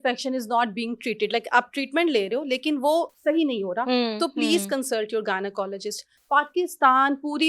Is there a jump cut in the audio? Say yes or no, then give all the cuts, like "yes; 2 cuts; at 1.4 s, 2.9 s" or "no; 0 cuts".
no; 0 cuts